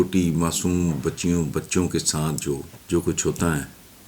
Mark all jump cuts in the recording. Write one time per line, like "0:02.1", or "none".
0:02.7

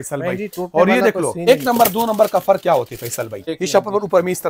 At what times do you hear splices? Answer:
0:01.4
0:03.4

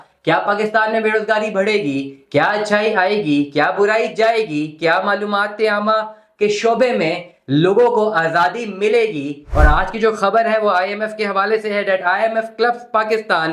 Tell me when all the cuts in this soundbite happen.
0:09.4

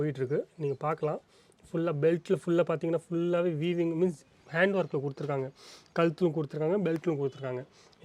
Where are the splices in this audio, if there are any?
none

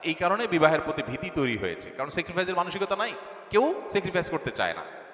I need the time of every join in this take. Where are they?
none

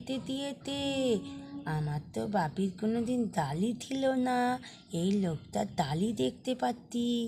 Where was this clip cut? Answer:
none

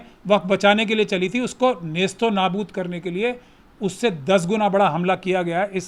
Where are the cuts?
none

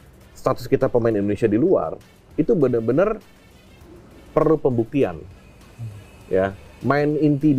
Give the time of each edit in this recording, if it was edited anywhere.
none

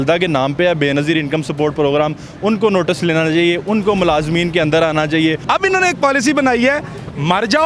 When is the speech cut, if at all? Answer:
0:05.4

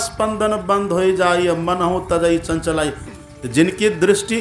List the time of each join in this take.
0:03.1

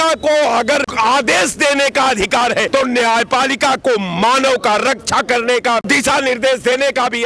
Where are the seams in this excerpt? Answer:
0:00.9
0:02.7
0:05.8

